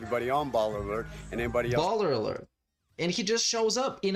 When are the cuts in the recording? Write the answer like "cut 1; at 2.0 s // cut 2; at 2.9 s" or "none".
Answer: none